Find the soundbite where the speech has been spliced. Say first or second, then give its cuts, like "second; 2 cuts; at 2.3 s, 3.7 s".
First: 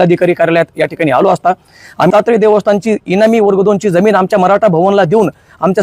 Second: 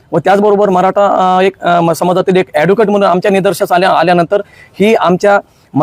first; 1 cut; at 2.1 s